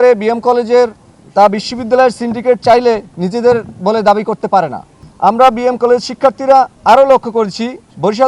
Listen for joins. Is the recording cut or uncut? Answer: uncut